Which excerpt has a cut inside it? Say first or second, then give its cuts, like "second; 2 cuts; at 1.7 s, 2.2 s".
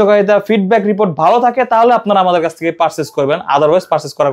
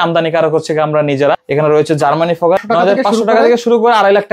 second; 2 cuts; at 1.4 s, 2.6 s